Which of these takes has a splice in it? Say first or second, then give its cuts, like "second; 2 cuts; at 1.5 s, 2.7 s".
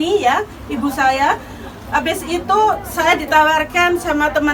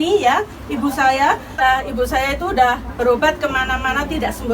second; 1 cut; at 1.6 s